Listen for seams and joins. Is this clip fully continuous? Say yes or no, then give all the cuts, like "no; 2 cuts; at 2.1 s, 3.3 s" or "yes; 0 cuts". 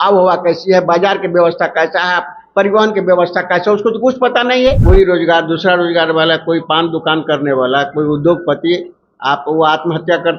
no; 1 cut; at 4.8 s